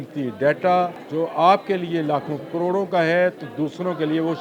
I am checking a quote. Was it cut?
yes; 1 cut; at 1.0 s

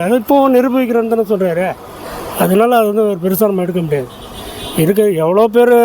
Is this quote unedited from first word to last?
yes; 0 cuts

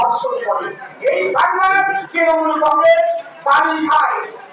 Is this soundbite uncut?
yes; 0 cuts

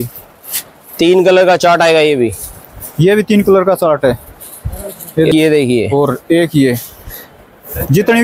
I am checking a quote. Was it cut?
yes; 1 cut; at 5.3 s

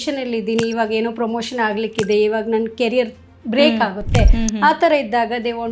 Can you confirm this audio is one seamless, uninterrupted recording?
yes; 0 cuts

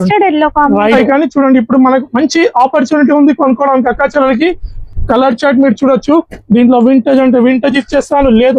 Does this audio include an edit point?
yes; 2 cuts; at 0.9 s, 4.8 s

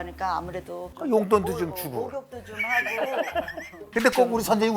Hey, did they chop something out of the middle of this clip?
no; 0 cuts

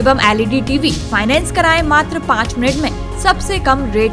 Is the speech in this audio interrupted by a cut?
no; 0 cuts

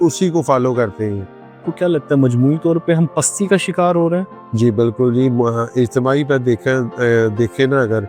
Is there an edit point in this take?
yes; 2 cuts; at 1.7 s, 4.4 s

